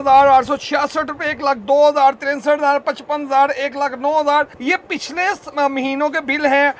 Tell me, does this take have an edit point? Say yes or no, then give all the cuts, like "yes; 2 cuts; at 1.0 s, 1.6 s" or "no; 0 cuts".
no; 0 cuts